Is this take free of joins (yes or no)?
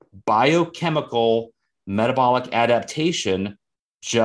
yes